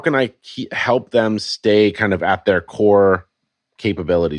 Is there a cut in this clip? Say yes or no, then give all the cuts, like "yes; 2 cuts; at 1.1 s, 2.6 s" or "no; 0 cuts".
no; 0 cuts